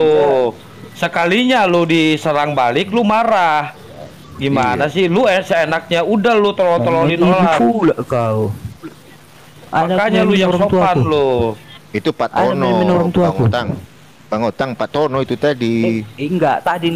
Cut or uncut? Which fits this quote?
uncut